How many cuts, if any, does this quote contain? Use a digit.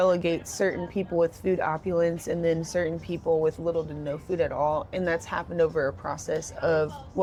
0